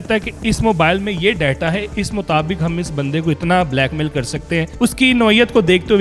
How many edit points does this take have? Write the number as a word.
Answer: one